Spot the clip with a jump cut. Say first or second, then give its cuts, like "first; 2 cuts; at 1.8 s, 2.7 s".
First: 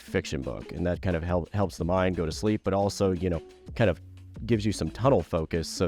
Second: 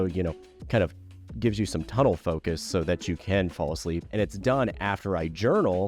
second; 1 cut; at 4.1 s